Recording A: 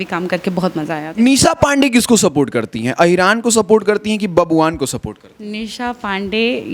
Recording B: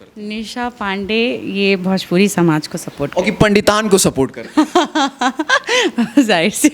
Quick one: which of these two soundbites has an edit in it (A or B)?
A